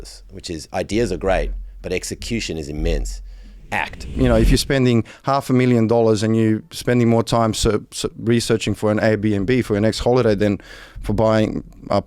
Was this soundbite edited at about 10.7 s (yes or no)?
no